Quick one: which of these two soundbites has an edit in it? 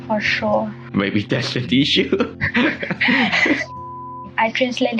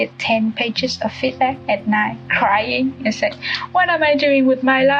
first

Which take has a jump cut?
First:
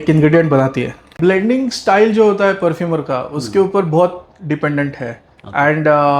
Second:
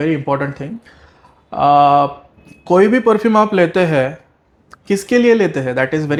first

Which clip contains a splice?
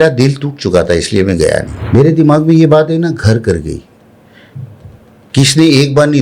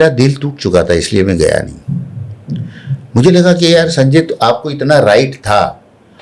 first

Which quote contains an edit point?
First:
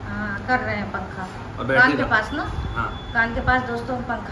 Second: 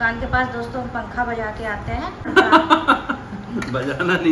second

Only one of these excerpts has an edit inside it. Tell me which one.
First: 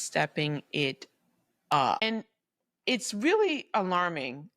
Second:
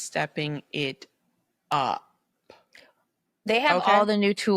first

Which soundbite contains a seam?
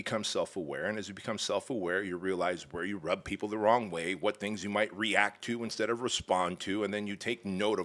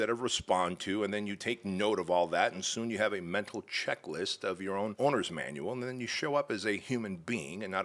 second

